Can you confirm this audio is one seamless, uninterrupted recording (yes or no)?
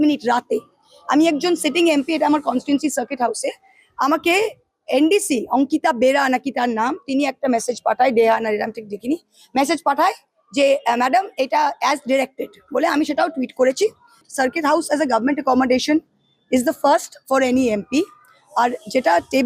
no